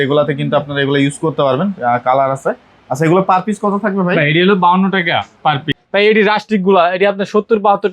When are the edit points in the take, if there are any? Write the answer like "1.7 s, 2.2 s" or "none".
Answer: 5.7 s